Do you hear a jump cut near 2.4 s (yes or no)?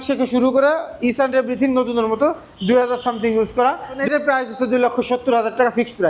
no